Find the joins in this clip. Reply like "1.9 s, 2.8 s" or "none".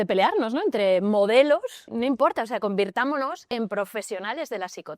1.8 s, 3.4 s

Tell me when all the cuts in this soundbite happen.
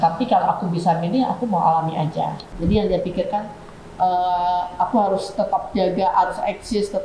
2.4 s

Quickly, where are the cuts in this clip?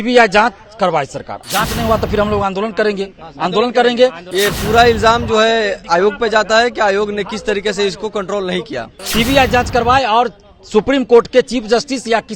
1.4 s, 4.2 s, 9.0 s

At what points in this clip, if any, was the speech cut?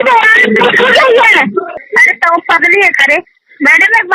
1.7 s

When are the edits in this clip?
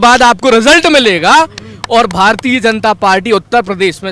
none

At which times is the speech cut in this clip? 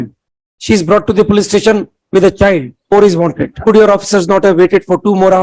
2.8 s, 3.6 s

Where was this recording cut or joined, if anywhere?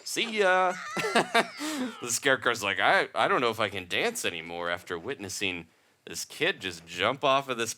none

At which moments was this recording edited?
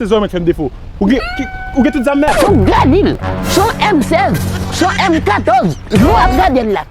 2.3 s

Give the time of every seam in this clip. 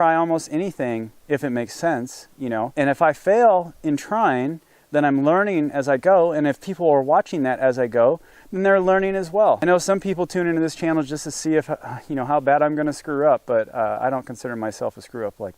2.7 s, 9.6 s

